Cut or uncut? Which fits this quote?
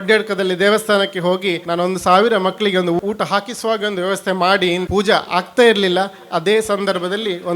cut